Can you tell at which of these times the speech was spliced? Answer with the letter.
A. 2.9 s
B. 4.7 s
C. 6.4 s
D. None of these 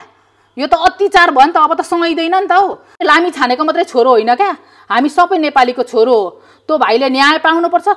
A